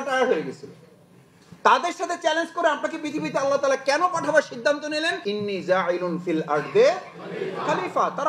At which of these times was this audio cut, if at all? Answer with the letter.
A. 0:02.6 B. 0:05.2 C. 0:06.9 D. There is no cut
B